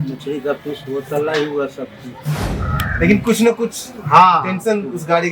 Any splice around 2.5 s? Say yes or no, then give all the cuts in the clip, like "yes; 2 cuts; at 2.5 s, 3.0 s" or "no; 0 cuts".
yes; 1 cut; at 2.5 s